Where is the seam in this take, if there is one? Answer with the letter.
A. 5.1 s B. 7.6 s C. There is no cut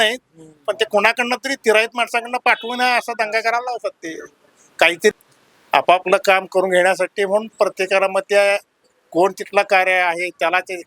A